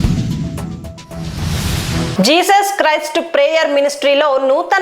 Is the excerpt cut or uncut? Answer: cut